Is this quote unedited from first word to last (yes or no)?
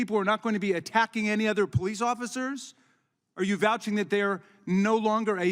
yes